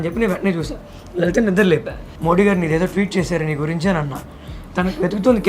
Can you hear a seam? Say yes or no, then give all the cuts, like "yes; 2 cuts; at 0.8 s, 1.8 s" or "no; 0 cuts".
yes; 2 cuts; at 2.0 s, 4.5 s